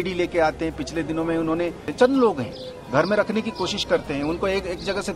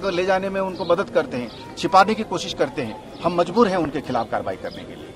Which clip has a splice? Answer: first; 1 cut; at 1.9 s

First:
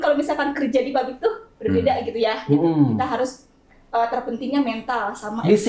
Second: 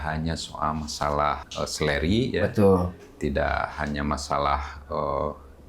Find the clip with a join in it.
second; 1 cut; at 1.5 s

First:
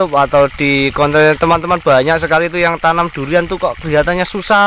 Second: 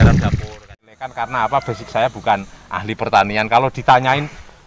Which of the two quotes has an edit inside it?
second; 1 cut; at 1.1 s

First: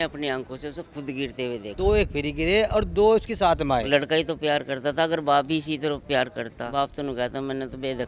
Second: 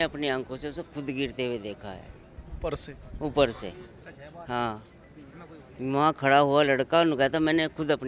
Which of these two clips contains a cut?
first; 3 cuts; at 1.7 s, 3.9 s, 6.6 s

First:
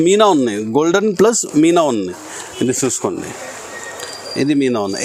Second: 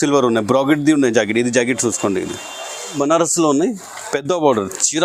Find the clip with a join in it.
second; 1 cut; at 2.9 s

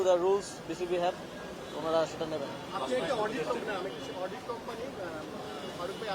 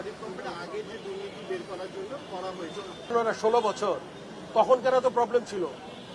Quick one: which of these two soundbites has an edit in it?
second; 1 cut; at 3.1 s

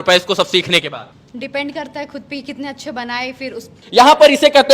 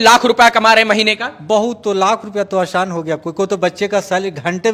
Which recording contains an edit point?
first; 2 cuts; at 1.2 s, 3.8 s

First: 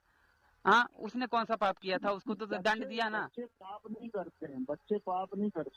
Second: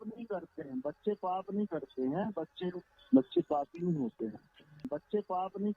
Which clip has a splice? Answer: second; 1 cut; at 4.8 s

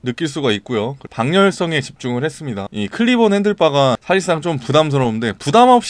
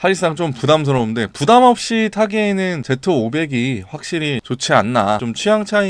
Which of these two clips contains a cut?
first; 1 cut; at 2.7 s

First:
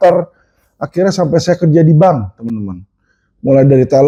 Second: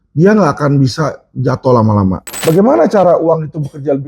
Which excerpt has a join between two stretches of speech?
second; 1 cut; at 2.3 s

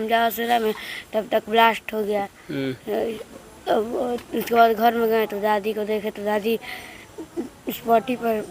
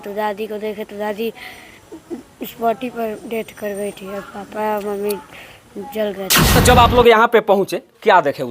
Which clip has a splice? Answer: second; 1 cut; at 6.5 s

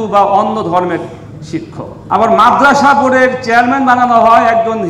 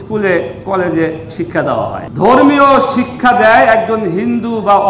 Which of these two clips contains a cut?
second; 1 cut; at 2.0 s

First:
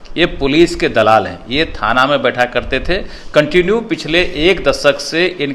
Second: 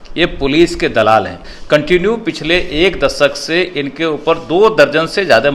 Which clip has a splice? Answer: second; 1 cut; at 1.4 s

